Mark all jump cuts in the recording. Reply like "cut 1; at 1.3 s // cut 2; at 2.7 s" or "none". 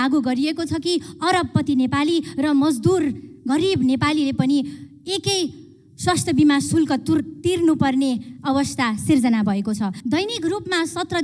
cut 1; at 10.0 s